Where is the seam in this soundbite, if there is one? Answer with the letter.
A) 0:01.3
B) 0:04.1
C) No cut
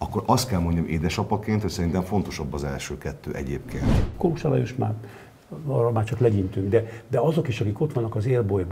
B